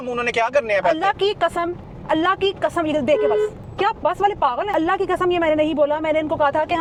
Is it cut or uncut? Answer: uncut